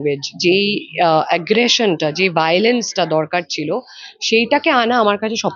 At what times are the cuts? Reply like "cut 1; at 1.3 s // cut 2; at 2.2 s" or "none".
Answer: none